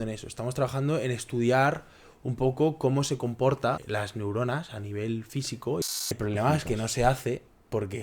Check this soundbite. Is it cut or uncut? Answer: cut